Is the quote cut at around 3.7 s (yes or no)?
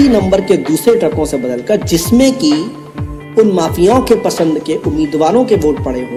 no